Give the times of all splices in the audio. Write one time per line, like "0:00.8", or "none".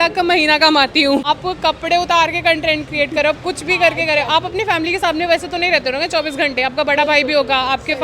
0:01.2